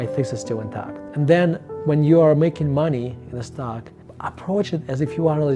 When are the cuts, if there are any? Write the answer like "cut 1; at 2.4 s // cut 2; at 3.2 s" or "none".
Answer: cut 1; at 1.0 s // cut 2; at 3.5 s